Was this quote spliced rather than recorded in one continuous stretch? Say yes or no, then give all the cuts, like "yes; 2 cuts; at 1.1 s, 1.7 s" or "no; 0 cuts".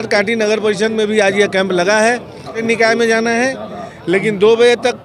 yes; 1 cut; at 2.6 s